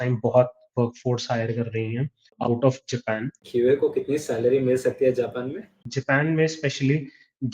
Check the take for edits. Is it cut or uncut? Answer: cut